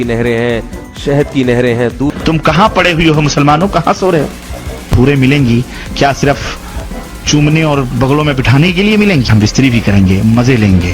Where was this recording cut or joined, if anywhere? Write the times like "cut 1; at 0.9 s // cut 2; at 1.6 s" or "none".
cut 1; at 2.2 s // cut 2; at 4.9 s // cut 3; at 9.3 s